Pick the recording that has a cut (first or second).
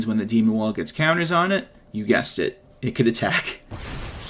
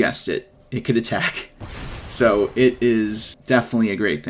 second